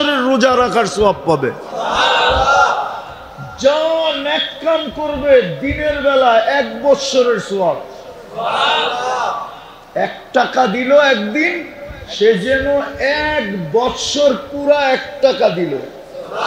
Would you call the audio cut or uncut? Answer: uncut